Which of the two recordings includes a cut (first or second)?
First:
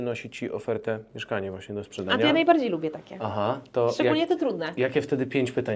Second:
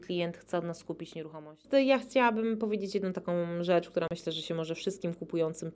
second